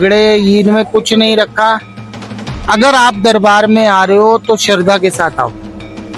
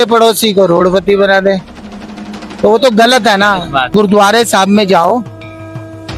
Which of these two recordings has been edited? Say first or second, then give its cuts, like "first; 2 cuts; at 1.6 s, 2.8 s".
second; 1 cut; at 3.9 s